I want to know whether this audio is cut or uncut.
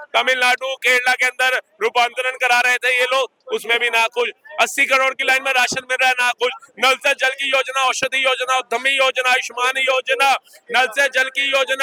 uncut